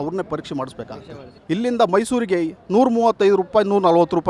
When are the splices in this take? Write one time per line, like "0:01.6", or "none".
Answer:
0:01.3

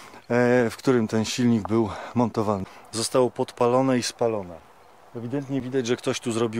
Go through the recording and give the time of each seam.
0:02.6

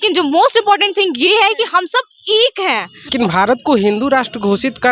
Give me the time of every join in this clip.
0:03.1

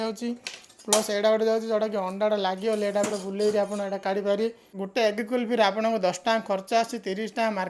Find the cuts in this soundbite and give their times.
0:04.9

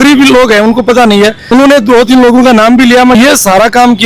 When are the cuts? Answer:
0:01.4
0:03.2

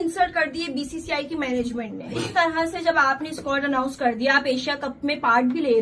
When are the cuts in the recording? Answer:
0:02.1

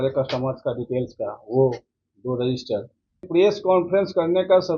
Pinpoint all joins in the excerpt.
0:03.3

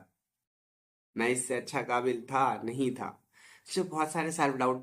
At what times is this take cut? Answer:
none

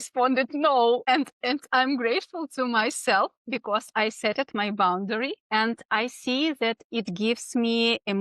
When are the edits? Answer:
0:01.0
0:05.4

